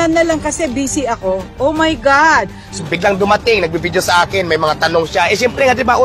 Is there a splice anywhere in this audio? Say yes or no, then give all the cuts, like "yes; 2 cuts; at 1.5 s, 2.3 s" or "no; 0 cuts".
yes; 1 cut; at 2.8 s